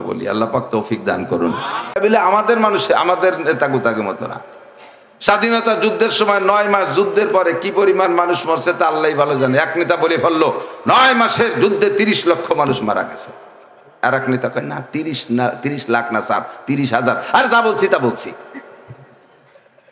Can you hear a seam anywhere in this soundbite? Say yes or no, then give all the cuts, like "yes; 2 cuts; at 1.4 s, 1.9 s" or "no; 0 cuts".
yes; 1 cut; at 2.0 s